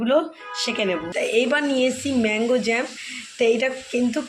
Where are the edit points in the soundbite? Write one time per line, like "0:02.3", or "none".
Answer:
0:01.0